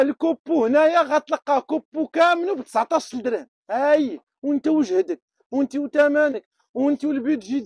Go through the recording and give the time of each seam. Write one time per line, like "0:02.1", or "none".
none

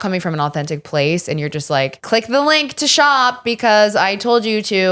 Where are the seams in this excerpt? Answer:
0:02.0

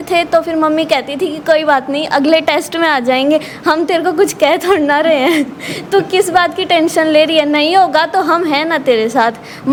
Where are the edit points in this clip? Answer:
none

